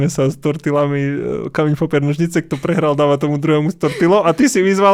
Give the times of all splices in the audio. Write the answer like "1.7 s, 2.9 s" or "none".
none